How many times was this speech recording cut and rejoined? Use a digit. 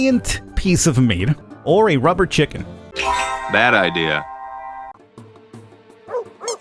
2